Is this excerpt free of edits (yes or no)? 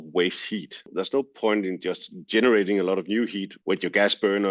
no